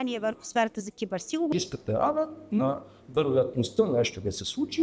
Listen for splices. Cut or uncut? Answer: cut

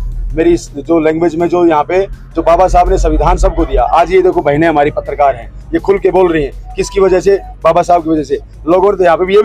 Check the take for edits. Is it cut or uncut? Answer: uncut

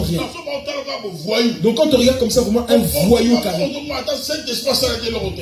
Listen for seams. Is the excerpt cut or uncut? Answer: uncut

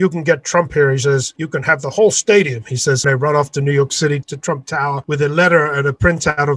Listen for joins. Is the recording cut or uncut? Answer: cut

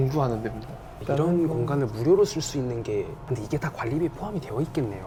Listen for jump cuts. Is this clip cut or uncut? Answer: uncut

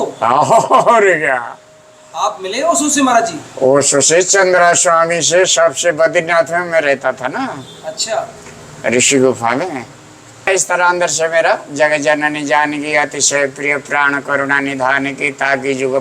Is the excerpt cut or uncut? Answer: cut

